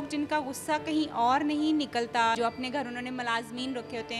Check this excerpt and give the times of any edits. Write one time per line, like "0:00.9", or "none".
0:02.4